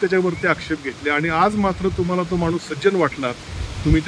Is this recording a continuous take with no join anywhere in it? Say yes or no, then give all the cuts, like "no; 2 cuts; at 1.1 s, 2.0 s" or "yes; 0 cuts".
yes; 0 cuts